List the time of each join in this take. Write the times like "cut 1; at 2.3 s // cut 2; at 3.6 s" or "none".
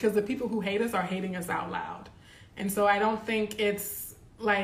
none